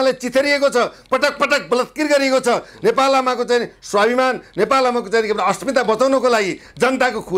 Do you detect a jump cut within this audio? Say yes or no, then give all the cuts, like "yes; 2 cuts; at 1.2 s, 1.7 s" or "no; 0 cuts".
no; 0 cuts